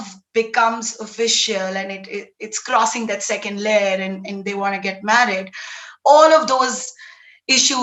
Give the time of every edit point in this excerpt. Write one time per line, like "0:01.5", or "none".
none